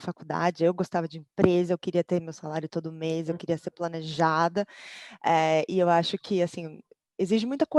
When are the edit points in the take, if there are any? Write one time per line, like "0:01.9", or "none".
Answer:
none